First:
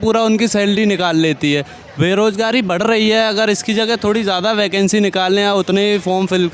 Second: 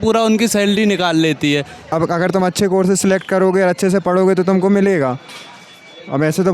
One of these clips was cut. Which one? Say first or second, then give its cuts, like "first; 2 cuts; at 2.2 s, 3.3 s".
second; 1 cut; at 1.8 s